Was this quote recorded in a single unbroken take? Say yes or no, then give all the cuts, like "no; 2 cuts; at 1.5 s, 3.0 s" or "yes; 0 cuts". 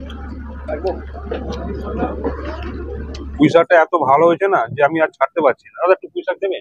no; 1 cut; at 3.3 s